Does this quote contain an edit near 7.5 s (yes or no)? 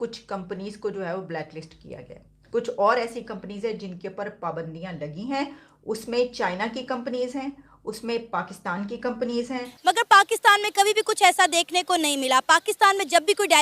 no